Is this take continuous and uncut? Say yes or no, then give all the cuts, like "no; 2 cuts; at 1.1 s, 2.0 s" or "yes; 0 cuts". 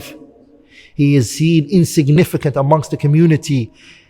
no; 1 cut; at 2.2 s